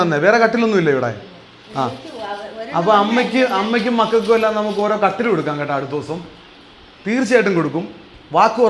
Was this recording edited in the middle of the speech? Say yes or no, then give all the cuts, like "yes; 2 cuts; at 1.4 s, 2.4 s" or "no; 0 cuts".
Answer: no; 0 cuts